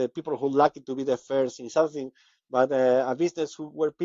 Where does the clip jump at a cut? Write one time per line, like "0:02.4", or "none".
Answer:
none